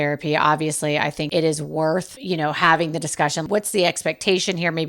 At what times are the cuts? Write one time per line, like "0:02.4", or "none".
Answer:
0:01.3
0:02.1
0:03.5